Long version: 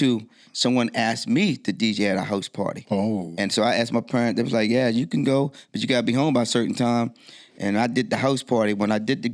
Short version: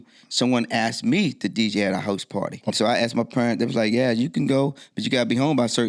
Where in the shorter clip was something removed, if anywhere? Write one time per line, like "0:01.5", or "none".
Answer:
0:02.7